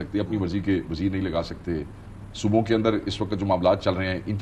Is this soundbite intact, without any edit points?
yes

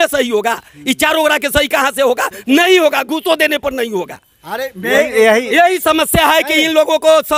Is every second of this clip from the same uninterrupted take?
yes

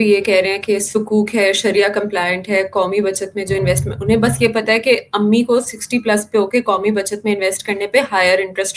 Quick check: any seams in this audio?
no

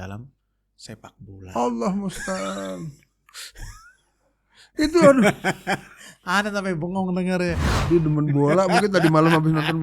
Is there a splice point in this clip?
yes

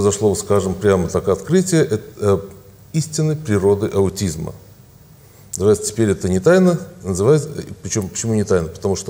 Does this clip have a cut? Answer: no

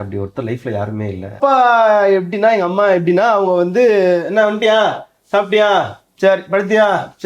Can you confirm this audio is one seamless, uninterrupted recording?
no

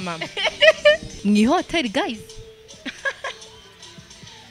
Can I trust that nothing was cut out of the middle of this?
no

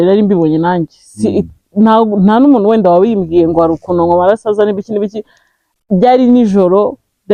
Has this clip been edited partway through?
no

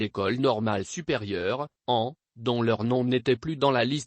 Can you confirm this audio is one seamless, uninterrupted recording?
no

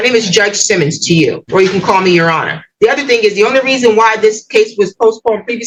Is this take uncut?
yes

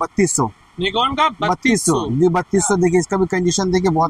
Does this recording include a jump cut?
no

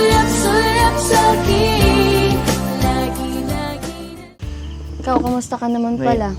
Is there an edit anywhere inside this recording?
yes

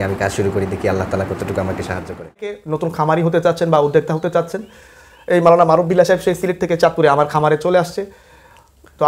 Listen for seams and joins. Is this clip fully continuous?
no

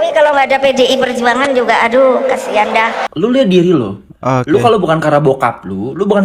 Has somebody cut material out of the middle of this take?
yes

